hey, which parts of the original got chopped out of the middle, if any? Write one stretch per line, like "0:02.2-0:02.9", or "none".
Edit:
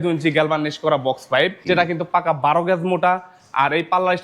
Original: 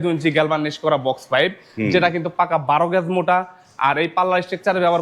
0:01.6-0:01.9